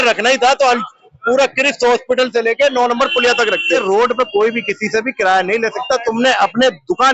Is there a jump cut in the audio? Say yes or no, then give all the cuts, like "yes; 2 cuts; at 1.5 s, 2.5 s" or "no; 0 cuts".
yes; 1 cut; at 3.6 s